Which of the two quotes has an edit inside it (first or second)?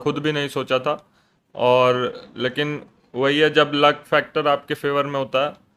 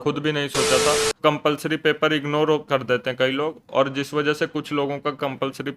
second